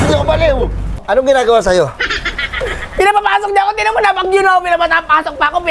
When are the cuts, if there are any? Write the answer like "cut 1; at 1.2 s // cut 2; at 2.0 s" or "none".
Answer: cut 1; at 1.0 s